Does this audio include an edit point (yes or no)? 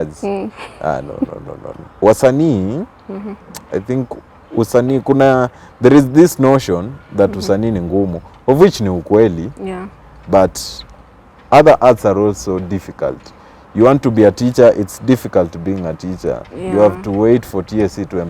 yes